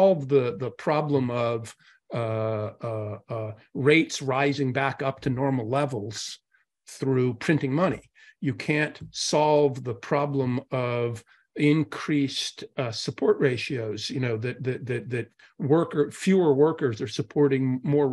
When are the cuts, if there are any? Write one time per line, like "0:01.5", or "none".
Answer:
none